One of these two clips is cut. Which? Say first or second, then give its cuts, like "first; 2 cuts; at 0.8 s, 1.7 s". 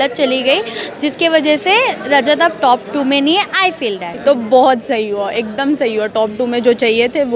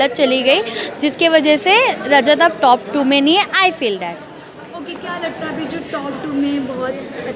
first; 1 cut; at 4.1 s